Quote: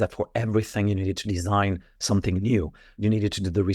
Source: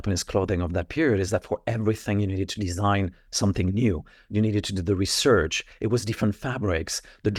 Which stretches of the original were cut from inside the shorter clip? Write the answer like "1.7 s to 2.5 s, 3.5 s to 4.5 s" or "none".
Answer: none